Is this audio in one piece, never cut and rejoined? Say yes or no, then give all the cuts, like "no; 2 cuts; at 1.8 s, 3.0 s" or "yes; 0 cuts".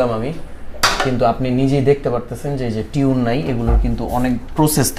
yes; 0 cuts